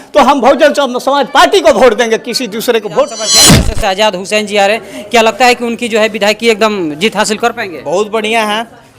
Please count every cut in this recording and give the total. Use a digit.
1